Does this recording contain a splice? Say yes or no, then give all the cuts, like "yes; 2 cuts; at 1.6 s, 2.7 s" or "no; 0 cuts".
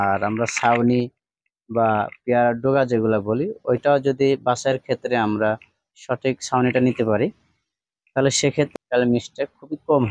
yes; 1 cut; at 8.7 s